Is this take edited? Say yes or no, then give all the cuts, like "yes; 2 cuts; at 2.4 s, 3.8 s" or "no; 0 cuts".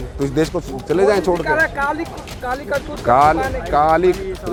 no; 0 cuts